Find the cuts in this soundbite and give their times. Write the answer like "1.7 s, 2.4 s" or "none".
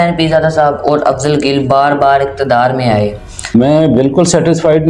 3.5 s